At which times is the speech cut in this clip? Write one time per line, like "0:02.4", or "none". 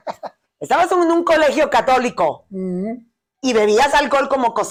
none